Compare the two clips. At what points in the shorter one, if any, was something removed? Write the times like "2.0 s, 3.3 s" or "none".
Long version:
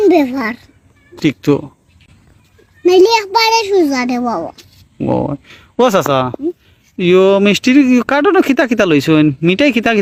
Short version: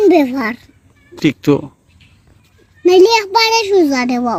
none